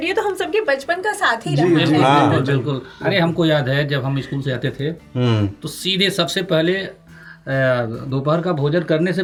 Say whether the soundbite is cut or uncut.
uncut